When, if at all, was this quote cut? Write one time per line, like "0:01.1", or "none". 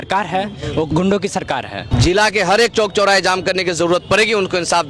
0:00.9
0:01.8